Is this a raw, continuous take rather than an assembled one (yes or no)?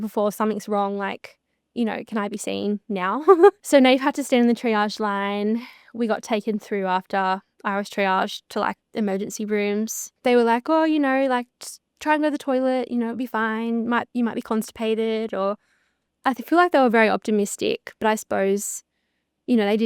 no